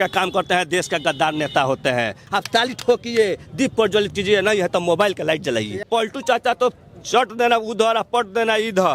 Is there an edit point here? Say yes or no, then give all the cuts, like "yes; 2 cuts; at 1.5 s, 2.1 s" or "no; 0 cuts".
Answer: yes; 2 cuts; at 2.2 s, 5.8 s